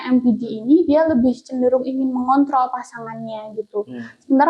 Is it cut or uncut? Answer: uncut